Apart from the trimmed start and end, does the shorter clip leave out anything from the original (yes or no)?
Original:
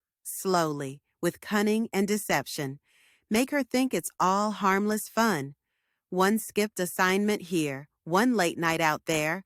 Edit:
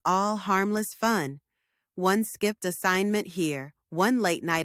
no